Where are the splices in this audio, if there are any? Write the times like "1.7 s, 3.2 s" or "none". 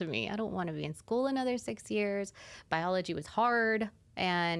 none